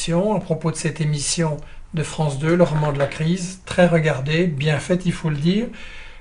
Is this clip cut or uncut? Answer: cut